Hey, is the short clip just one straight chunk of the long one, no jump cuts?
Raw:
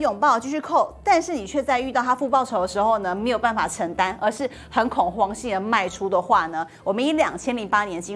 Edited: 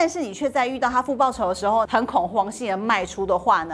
no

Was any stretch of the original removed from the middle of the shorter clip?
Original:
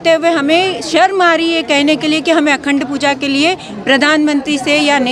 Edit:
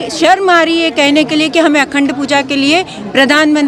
no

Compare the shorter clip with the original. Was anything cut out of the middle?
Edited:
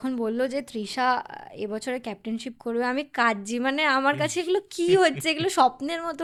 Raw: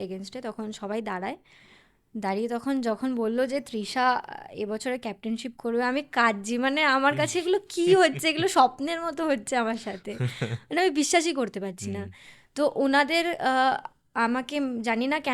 no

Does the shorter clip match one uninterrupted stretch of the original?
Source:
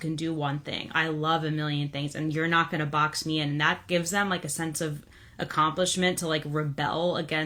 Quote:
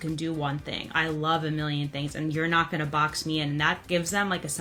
yes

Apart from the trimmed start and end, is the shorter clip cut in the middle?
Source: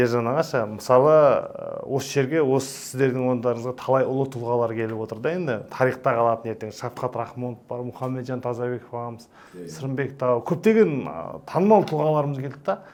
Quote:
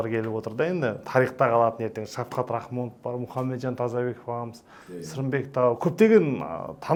no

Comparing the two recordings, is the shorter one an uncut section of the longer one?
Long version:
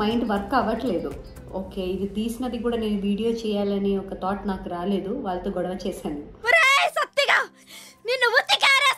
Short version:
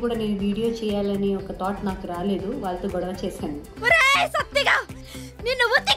yes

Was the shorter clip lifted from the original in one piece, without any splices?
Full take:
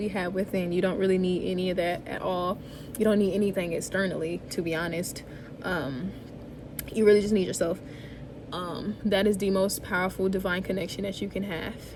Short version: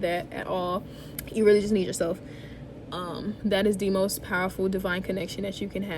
no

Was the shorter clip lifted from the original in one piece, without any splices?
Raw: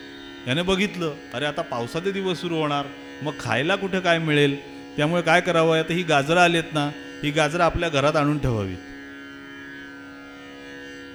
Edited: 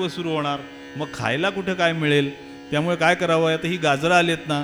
yes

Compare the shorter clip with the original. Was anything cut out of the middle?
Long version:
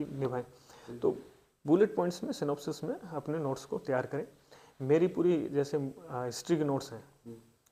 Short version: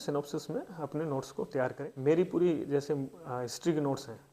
yes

